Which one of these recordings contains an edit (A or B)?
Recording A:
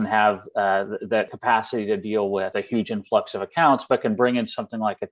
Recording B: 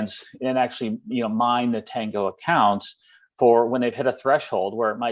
A